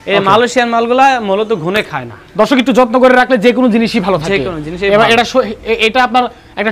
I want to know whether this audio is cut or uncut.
cut